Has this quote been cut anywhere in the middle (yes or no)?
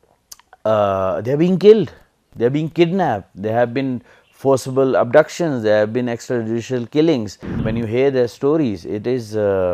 yes